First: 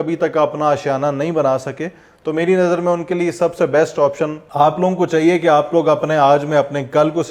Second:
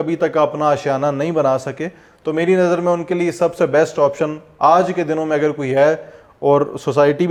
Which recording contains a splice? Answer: first; 1 cut; at 4.4 s

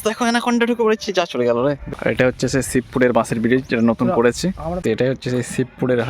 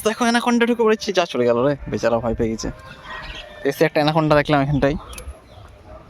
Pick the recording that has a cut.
first; 2 cuts; at 1.9 s, 4.6 s

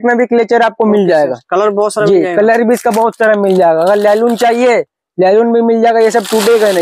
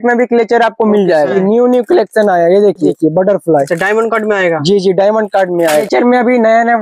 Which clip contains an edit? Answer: second; 3 cuts; at 1.3 s, 2.9 s, 5.8 s

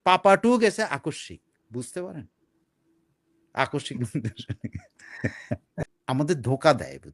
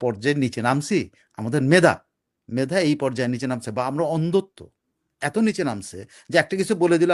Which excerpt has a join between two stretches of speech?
first; 1 cut; at 5.8 s

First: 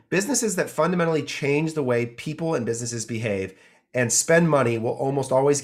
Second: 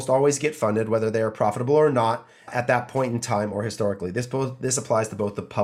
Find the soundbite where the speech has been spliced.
second; 1 cut; at 2.5 s

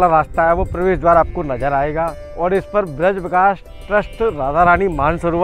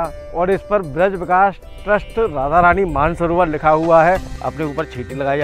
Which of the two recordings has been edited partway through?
second; 1 cut; at 4.3 s

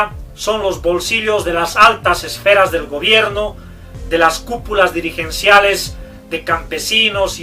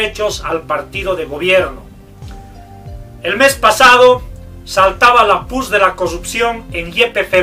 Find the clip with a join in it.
first; 1 cut; at 6.0 s

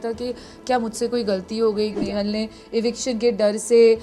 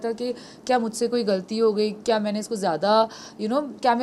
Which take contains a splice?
first; 1 cut; at 2.0 s

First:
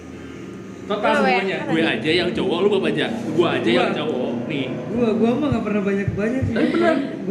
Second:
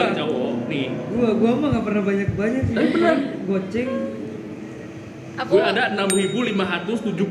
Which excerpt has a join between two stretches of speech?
first; 1 cut; at 1.7 s

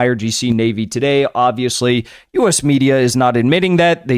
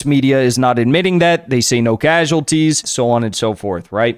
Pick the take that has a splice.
second; 1 cut; at 2.9 s

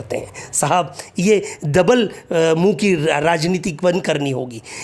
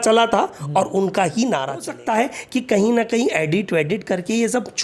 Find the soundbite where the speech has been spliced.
second; 1 cut; at 1.9 s

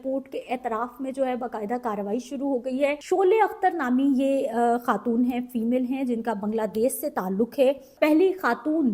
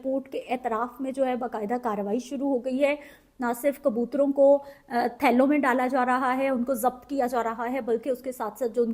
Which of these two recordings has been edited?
first; 2 cuts; at 3.0 s, 7.9 s

